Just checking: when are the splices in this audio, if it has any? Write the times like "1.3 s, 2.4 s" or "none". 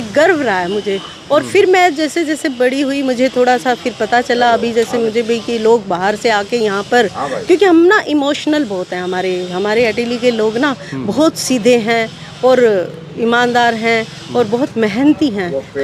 none

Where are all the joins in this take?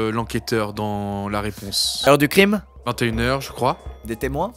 1.9 s

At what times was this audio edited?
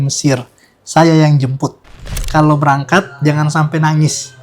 2.1 s

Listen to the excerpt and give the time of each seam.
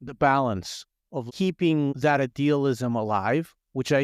1.3 s

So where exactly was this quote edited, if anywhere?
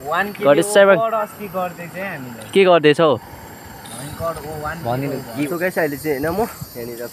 5.5 s

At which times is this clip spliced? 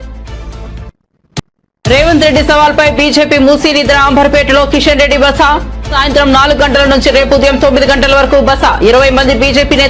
1.4 s

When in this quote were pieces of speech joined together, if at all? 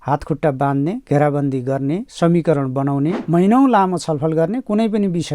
3.2 s

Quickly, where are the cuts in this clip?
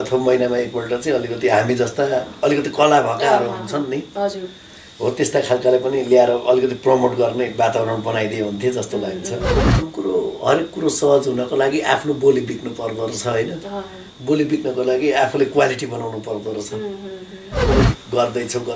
9.6 s, 17.7 s

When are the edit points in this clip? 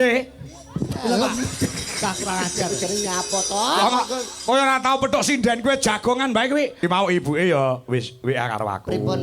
6.8 s

